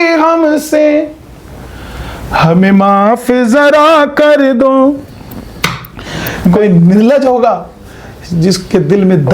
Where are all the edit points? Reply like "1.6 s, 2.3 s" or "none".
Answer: 6.5 s